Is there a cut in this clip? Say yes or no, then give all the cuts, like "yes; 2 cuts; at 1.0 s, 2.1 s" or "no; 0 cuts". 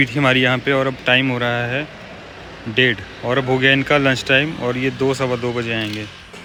no; 0 cuts